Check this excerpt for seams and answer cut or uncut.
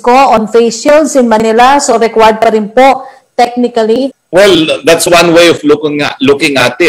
cut